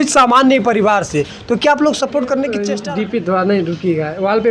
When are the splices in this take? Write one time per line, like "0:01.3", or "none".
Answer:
0:02.7